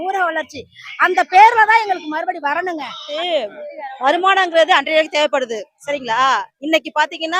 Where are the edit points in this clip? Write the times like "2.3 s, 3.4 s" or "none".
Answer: 3.0 s

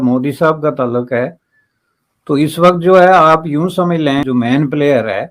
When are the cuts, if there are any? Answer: 4.2 s

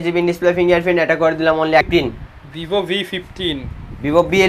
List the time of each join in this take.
1.8 s

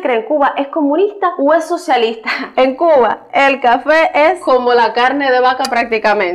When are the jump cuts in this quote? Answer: 2.4 s

